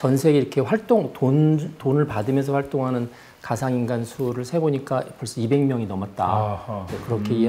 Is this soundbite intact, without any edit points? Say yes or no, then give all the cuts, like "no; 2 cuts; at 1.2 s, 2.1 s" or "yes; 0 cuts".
yes; 0 cuts